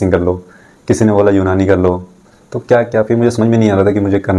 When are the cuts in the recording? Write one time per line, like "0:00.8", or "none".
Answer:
none